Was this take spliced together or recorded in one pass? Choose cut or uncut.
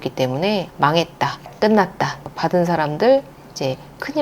cut